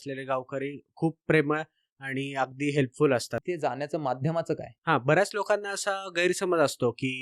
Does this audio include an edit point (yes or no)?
yes